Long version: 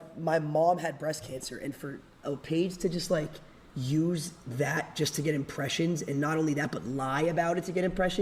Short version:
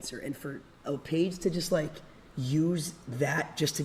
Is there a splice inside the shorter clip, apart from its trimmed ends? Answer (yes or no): no